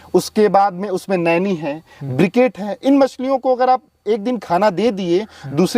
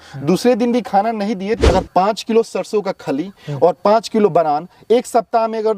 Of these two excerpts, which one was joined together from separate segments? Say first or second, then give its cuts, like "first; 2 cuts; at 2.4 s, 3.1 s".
second; 1 cut; at 1.7 s